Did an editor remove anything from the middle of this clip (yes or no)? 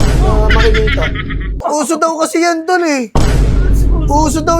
yes